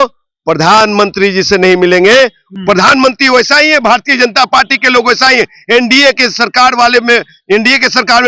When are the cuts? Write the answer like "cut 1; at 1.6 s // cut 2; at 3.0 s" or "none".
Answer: cut 1; at 2.4 s